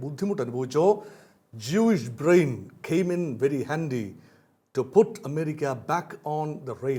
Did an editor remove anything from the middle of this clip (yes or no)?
no